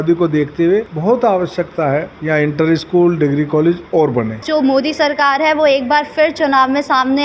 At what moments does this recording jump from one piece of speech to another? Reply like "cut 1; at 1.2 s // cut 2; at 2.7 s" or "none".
cut 1; at 0.9 s // cut 2; at 2.1 s // cut 3; at 4.4 s